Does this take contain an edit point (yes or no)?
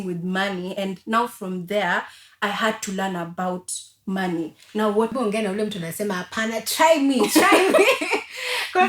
yes